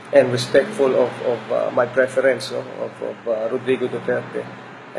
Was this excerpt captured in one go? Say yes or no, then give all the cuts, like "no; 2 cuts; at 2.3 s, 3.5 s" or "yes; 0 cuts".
yes; 0 cuts